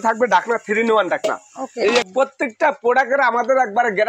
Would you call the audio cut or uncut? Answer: cut